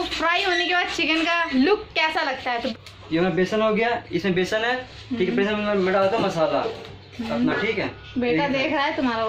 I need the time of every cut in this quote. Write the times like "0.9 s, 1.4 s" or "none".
2.7 s